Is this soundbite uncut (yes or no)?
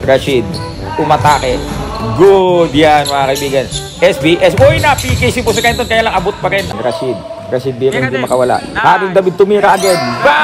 no